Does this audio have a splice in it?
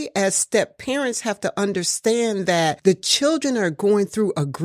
no; 0 cuts

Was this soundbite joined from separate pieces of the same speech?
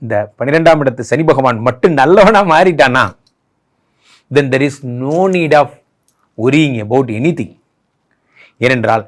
no; 0 cuts

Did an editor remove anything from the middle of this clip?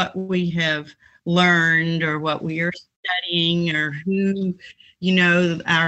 no; 0 cuts

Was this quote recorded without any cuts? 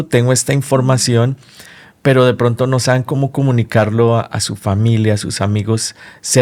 yes; 0 cuts

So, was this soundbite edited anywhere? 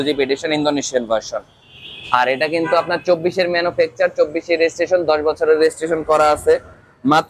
no; 0 cuts

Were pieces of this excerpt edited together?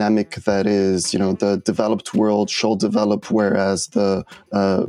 no; 0 cuts

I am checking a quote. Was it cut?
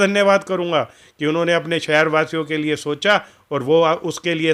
no; 0 cuts

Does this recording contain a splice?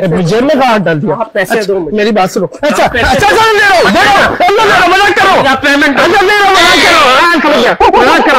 no; 0 cuts

